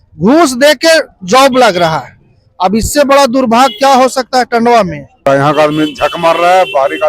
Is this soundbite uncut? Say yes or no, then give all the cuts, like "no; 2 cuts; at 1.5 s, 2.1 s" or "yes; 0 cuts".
no; 1 cut; at 5.2 s